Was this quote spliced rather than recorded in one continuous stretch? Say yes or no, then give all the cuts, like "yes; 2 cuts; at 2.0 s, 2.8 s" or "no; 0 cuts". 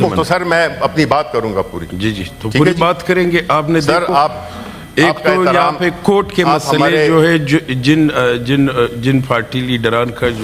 no; 0 cuts